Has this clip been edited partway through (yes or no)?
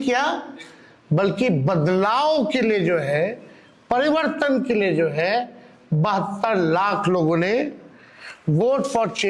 no